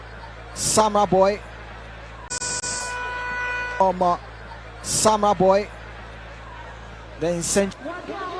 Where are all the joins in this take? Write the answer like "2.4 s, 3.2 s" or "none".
2.3 s